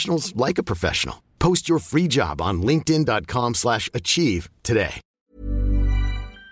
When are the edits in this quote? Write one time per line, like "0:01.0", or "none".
0:05.0